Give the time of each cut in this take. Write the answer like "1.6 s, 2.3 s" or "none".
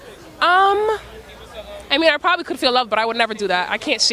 none